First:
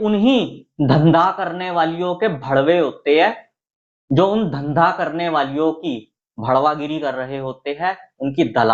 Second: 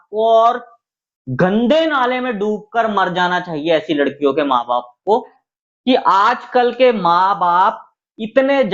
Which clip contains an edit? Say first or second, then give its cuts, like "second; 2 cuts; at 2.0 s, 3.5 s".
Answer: second; 1 cut; at 5.4 s